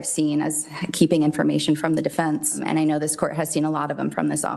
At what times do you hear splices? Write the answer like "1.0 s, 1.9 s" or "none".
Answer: 2.6 s